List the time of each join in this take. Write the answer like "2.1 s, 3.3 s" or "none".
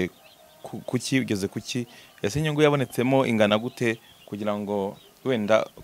none

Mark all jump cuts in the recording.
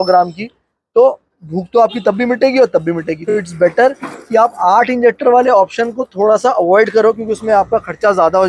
none

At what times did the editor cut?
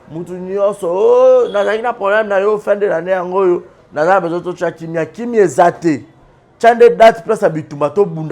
none

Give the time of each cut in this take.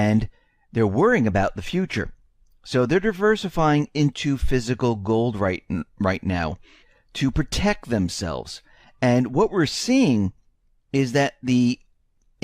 2.9 s

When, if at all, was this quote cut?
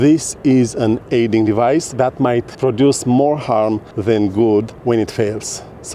2.5 s, 3.9 s, 4.7 s

